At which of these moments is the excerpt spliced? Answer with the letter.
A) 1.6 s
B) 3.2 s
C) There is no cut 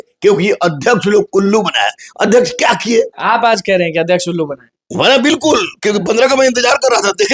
B